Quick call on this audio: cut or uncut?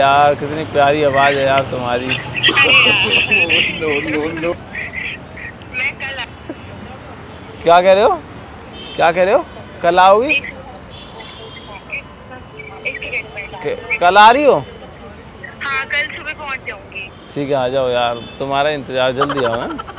uncut